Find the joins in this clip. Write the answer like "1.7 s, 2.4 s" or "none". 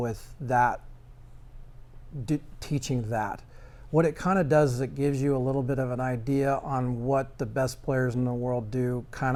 none